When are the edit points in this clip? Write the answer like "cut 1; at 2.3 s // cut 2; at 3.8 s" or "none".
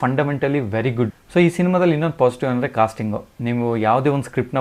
none

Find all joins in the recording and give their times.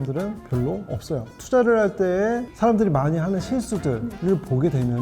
cut 1; at 1.3 s

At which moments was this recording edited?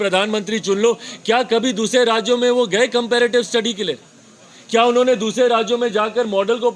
none

